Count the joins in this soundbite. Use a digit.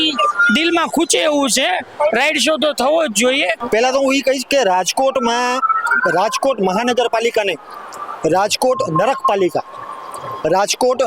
1